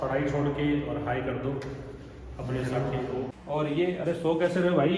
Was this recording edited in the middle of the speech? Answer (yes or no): yes